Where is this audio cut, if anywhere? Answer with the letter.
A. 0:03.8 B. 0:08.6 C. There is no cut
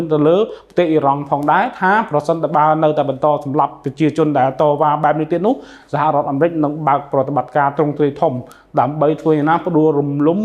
C